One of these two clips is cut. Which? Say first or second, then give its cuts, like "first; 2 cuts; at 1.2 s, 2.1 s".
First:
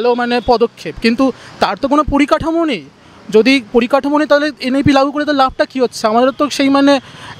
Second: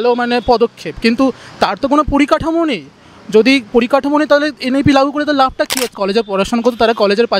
second; 1 cut; at 6.0 s